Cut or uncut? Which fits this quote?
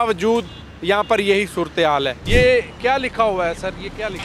cut